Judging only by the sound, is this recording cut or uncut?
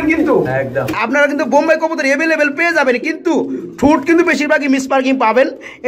cut